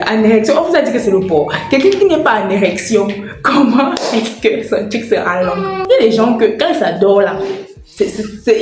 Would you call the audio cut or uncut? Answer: cut